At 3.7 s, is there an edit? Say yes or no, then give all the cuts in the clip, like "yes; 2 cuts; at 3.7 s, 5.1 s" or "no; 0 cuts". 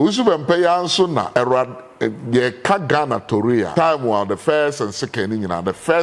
yes; 2 cuts; at 1.3 s, 3.7 s